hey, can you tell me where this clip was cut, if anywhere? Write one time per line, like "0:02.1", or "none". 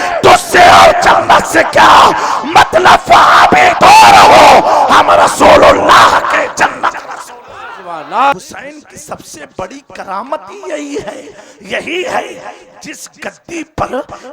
0:08.3